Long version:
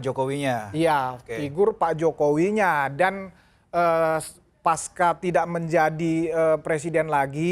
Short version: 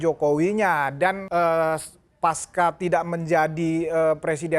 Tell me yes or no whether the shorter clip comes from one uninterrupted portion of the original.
no